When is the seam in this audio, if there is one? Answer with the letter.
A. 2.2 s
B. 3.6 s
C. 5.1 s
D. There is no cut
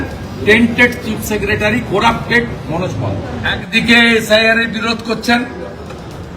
B